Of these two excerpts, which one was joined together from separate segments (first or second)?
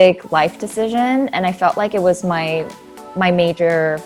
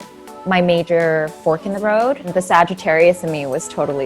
second